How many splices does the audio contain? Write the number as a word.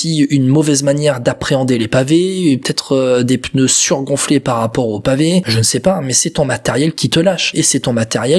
two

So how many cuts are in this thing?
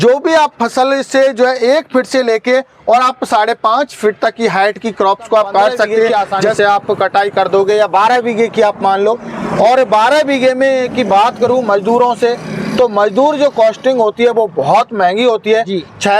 one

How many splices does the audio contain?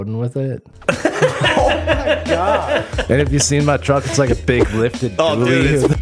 zero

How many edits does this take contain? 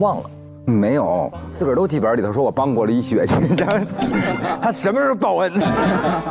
one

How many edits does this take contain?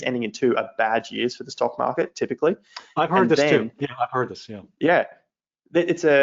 zero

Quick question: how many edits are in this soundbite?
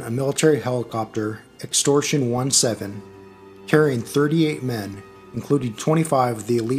one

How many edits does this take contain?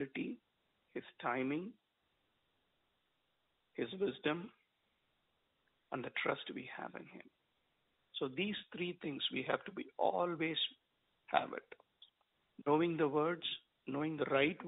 zero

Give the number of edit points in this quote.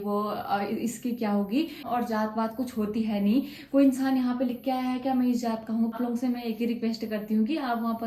two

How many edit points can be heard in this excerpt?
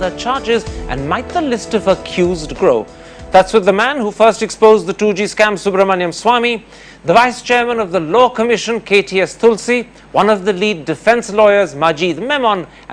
one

